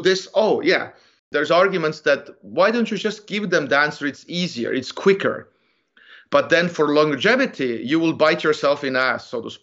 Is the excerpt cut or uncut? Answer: cut